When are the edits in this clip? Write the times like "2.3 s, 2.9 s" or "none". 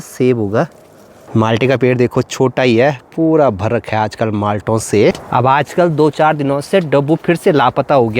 1.2 s, 5.2 s